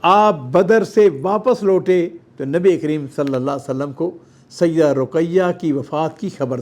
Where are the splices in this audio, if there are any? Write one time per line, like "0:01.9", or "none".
none

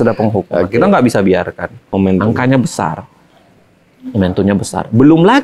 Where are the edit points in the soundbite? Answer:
0:01.8

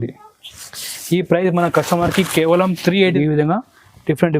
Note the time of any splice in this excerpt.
0:03.1

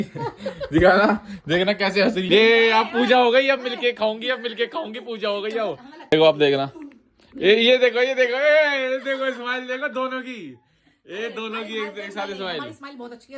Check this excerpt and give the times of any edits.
0:02.3
0:06.1

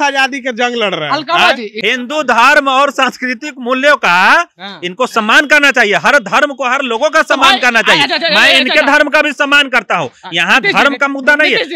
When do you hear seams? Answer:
0:01.7

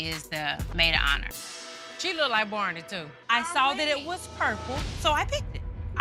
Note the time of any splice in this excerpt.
none

